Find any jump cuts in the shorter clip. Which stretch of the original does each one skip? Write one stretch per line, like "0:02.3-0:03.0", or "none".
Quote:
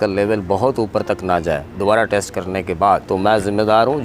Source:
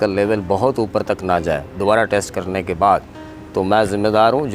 0:03.0-0:03.5